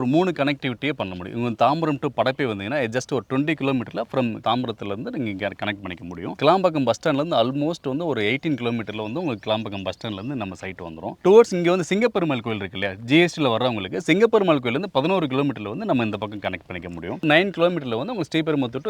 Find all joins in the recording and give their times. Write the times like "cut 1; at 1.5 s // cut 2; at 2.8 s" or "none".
cut 1; at 4.4 s // cut 2; at 11.1 s // cut 3; at 17.2 s